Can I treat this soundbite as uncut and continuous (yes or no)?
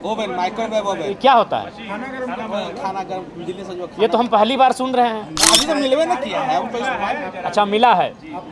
yes